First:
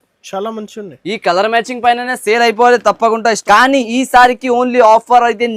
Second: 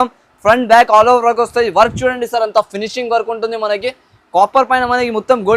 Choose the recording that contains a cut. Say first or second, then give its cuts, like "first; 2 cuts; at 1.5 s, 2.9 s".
first; 1 cut; at 3.4 s